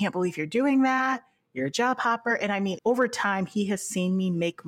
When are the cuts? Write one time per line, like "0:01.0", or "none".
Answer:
0:02.8